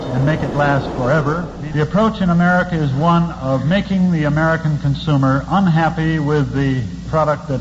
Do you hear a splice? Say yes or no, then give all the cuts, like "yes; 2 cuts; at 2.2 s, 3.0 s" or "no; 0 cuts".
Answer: yes; 1 cut; at 1.5 s